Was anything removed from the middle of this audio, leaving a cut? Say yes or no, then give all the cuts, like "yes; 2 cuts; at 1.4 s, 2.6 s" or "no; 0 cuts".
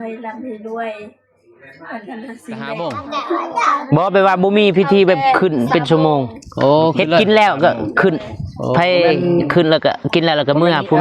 yes; 1 cut; at 2.8 s